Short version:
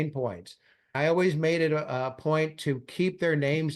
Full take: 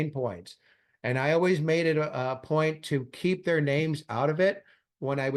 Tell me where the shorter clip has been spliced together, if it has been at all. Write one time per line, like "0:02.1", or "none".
0:00.9